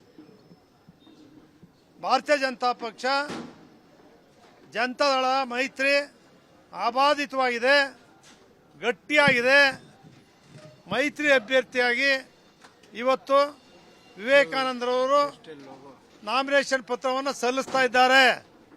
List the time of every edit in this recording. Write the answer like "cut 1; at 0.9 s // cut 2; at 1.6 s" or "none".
cut 1; at 14.8 s